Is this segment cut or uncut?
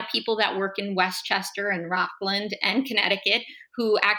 uncut